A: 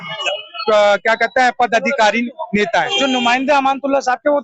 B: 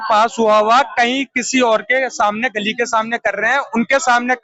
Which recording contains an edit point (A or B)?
A